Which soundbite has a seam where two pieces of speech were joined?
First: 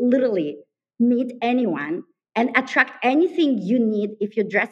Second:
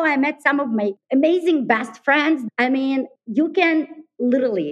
second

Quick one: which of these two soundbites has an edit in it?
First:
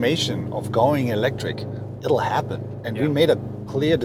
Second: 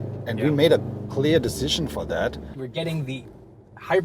second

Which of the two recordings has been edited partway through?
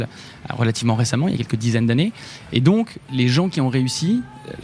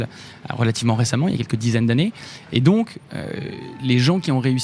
first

